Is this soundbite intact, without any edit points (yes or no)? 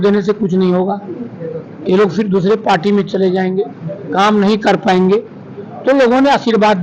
yes